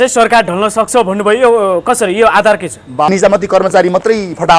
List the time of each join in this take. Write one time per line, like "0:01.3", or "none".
0:03.1

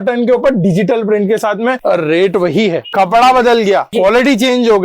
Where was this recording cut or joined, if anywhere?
0:01.8
0:02.8
0:03.9

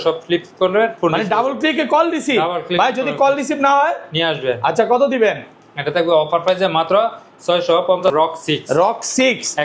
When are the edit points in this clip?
0:08.1

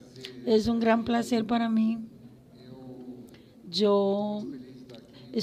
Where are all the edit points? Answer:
none

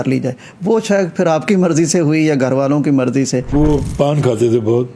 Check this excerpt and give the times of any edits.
0:03.5

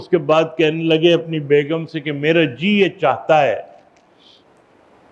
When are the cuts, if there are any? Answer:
none

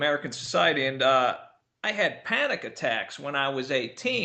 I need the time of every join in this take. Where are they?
0:02.2

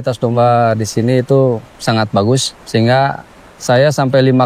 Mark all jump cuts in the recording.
0:01.7
0:02.5

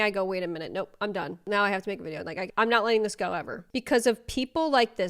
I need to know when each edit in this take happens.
0:01.5
0:02.5
0:03.7

